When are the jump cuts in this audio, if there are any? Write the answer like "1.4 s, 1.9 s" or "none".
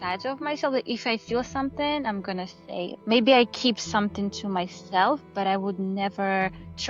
2.9 s